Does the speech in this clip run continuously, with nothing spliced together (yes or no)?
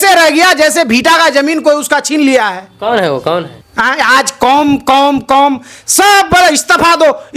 no